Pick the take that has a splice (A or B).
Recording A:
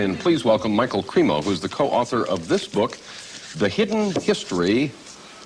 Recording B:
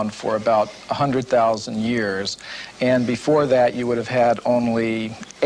B